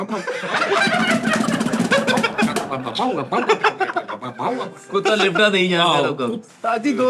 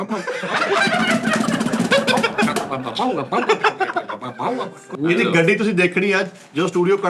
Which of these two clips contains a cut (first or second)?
second